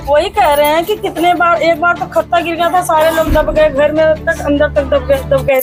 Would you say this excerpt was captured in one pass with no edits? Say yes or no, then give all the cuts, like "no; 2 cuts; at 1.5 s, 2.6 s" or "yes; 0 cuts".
yes; 0 cuts